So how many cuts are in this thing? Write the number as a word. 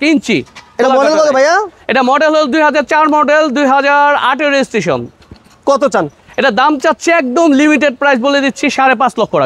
zero